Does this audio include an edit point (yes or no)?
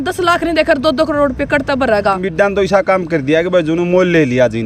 yes